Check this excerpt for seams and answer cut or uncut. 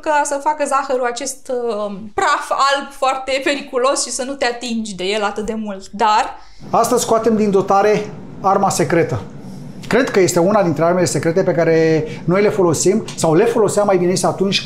cut